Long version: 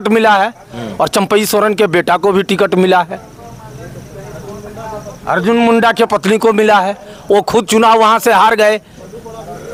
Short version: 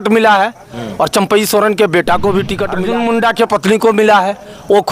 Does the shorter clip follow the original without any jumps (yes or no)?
no